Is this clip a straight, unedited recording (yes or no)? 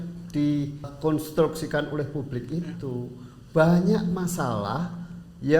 no